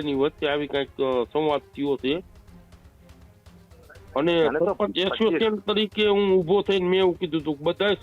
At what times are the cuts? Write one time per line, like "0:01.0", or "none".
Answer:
none